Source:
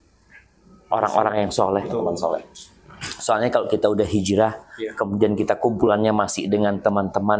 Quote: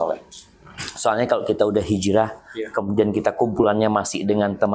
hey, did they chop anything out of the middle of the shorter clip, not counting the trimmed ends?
no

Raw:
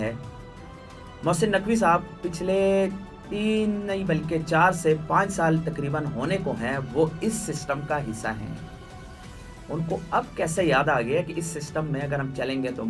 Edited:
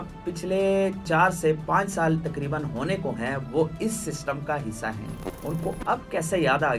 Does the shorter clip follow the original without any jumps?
no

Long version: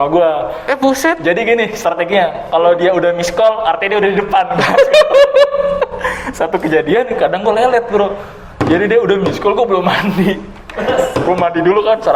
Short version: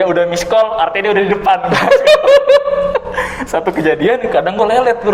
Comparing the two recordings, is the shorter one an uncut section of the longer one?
yes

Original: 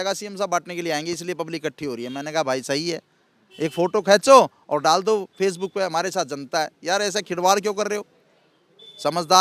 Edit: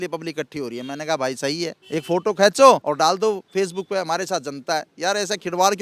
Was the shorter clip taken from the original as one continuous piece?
no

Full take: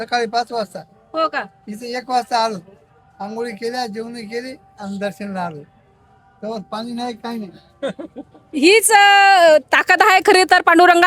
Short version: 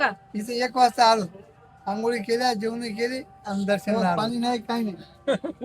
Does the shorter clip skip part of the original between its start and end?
yes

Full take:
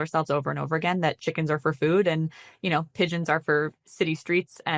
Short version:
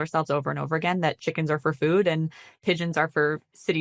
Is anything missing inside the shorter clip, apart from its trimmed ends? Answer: yes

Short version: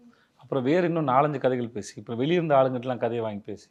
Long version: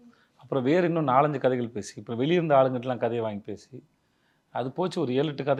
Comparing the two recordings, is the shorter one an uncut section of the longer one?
yes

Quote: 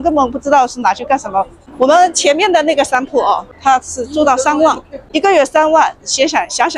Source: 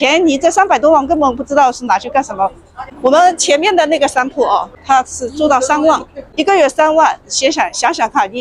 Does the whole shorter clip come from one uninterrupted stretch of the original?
no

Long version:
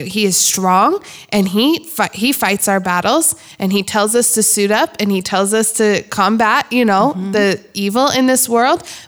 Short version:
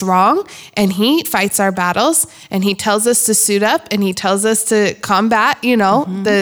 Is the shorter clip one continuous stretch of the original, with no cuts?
no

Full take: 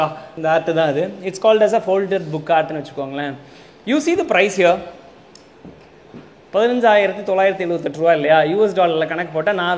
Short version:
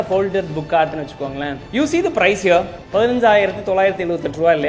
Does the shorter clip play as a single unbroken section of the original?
no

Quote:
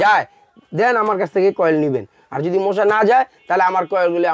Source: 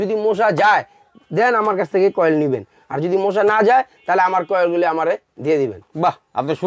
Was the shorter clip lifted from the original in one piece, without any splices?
yes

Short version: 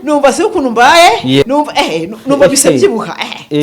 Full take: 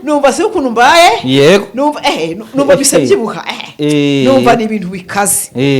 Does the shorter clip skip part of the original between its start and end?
yes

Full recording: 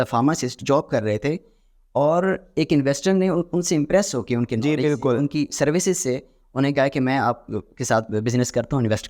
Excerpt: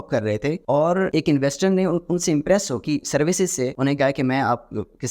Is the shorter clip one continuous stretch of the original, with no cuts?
no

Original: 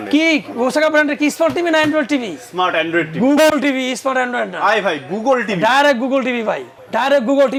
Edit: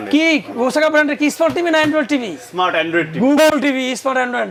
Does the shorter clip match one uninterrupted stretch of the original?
yes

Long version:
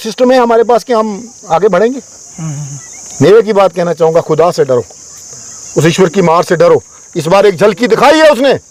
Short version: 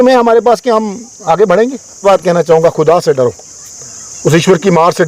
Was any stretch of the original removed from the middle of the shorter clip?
yes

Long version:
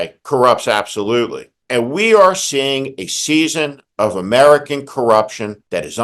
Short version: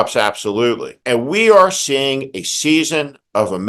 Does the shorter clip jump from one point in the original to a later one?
yes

